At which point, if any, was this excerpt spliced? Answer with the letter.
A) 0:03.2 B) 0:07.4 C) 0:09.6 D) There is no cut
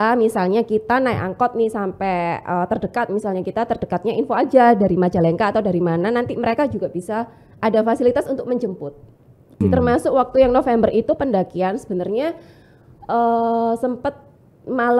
C